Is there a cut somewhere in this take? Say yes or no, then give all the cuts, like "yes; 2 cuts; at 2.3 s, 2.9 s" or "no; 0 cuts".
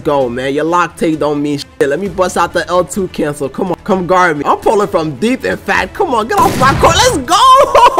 no; 0 cuts